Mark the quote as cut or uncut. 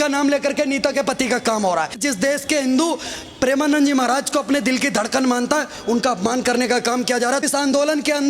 cut